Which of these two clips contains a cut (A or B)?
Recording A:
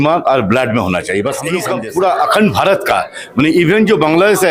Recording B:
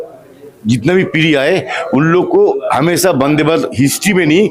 A